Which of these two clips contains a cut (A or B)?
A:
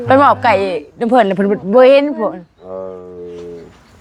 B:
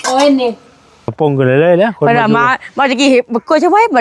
B